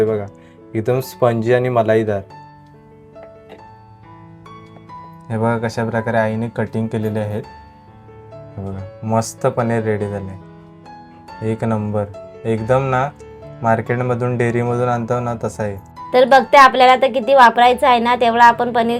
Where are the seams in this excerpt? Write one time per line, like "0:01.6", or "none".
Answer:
none